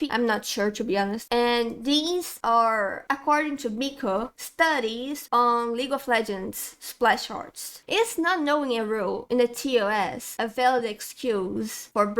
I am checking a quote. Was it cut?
yes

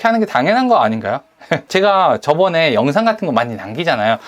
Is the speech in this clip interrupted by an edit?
yes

